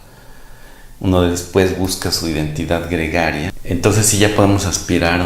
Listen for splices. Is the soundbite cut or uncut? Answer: cut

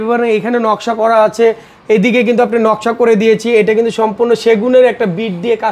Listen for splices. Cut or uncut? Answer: uncut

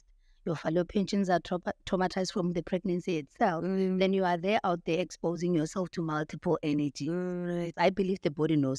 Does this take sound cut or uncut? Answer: cut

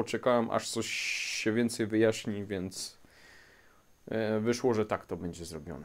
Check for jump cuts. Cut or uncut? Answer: uncut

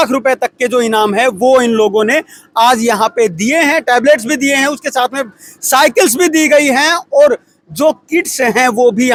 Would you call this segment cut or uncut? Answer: uncut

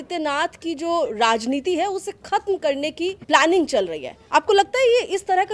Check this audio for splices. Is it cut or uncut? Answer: cut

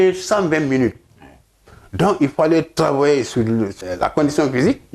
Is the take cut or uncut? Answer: cut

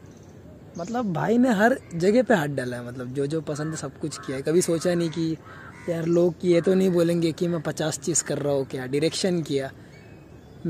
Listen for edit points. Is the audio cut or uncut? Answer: uncut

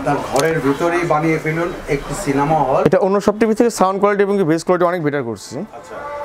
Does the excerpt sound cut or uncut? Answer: cut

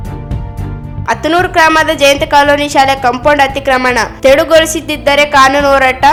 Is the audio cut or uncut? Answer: uncut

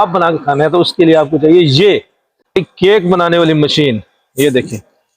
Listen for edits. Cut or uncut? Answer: cut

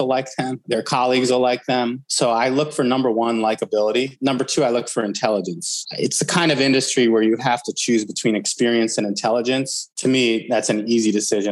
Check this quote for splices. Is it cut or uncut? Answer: cut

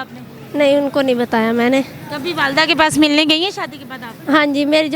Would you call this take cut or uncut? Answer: uncut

